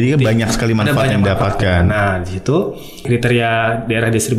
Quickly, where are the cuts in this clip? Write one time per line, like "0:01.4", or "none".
0:03.1